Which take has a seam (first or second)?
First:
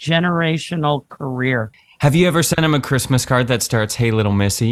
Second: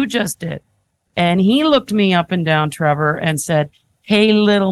first